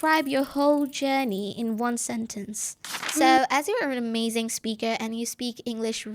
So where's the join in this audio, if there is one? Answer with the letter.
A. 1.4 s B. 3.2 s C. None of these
B